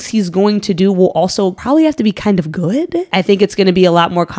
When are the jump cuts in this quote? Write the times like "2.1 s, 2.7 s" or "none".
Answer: 1.6 s, 3.1 s